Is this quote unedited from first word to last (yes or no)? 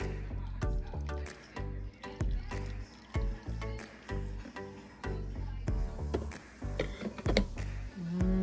yes